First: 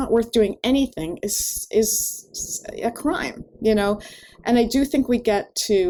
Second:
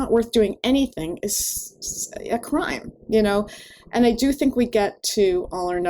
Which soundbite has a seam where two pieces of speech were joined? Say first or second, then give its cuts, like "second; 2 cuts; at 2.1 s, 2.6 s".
second; 1 cut; at 1.5 s